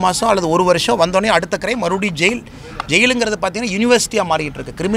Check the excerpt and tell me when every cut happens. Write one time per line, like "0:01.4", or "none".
none

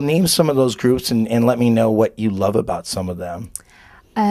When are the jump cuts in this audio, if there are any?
0:01.9

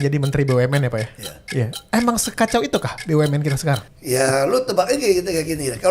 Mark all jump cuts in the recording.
0:03.9

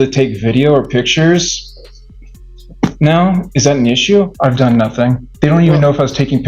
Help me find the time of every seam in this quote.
0:04.3
0:05.3

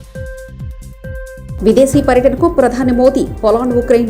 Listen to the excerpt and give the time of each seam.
0:01.1

